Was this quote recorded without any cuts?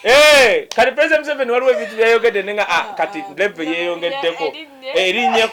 yes; 0 cuts

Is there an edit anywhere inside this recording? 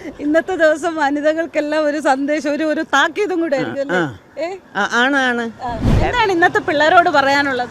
yes; 1 cut; at 5.9 s

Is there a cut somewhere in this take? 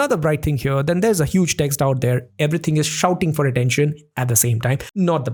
no; 0 cuts

